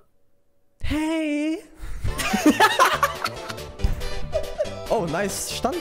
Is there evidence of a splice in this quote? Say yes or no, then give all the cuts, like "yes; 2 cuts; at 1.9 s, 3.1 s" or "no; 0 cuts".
no; 0 cuts